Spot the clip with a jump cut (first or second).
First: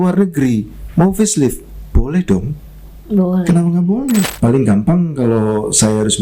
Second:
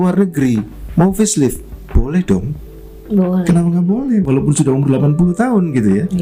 first